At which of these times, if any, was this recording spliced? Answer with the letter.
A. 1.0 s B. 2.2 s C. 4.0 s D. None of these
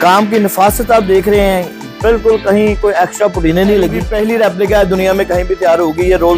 C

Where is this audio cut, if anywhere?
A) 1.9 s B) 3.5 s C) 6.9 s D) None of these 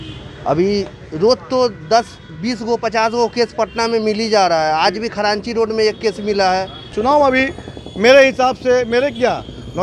C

